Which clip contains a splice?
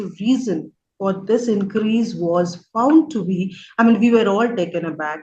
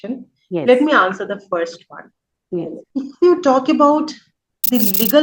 second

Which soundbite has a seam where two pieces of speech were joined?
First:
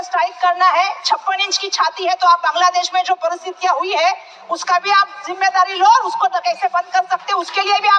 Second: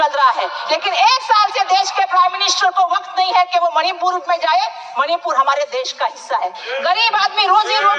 second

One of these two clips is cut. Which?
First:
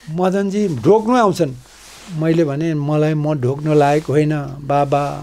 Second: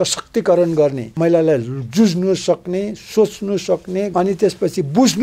second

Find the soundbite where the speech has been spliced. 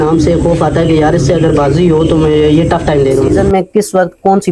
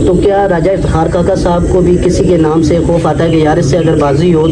first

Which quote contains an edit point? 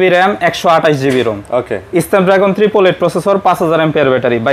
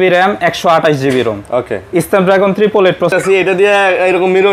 second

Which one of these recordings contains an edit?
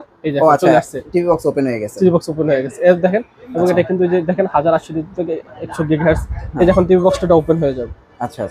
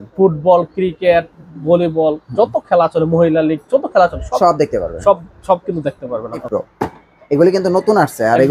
second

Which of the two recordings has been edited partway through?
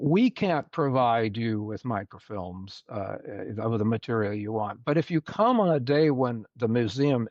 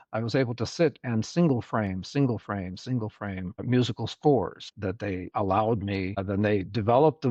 second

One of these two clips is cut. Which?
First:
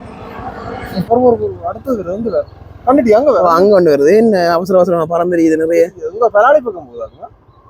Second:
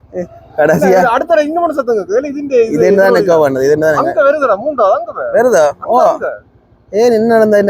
first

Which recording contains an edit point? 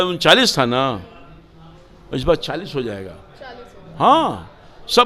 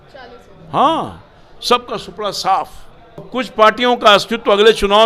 second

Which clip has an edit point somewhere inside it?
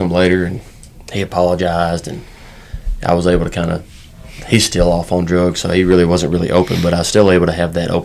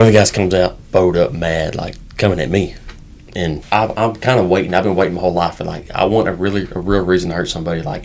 second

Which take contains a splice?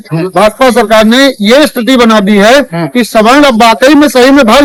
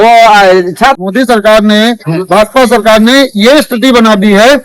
second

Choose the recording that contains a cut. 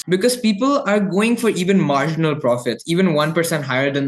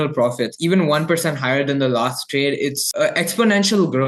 second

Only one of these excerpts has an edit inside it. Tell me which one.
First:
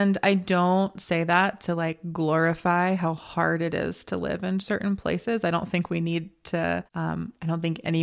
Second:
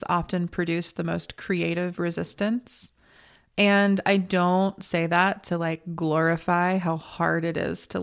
first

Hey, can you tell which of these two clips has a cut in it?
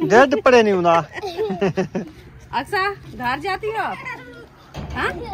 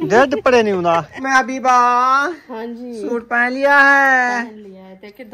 second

